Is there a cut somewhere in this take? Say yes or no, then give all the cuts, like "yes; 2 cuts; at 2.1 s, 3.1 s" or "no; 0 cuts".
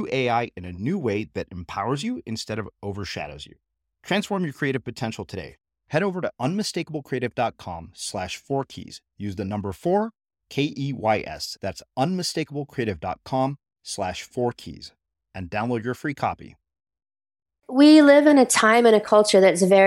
yes; 1 cut; at 17.6 s